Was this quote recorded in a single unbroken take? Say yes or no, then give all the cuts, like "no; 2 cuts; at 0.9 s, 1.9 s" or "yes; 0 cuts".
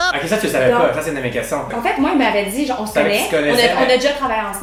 yes; 0 cuts